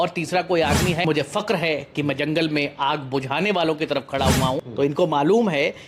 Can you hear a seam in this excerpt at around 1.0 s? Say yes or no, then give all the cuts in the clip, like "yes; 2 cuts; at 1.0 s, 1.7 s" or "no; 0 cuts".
yes; 2 cuts; at 1.0 s, 4.7 s